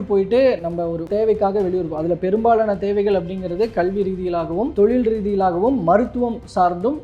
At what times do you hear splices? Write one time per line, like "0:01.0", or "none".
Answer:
0:01.1
0:04.7